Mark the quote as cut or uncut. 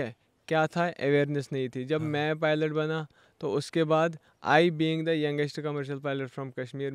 uncut